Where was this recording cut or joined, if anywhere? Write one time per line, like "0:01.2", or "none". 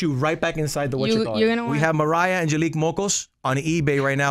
0:01.7